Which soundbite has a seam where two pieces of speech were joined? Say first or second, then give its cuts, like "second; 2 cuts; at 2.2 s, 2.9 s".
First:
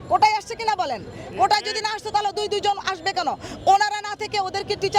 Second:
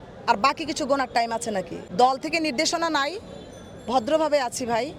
second; 1 cut; at 1.8 s